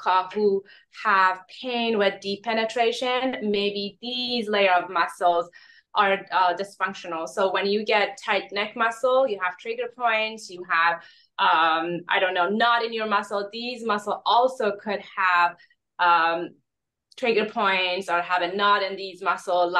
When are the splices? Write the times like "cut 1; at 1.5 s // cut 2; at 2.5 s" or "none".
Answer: none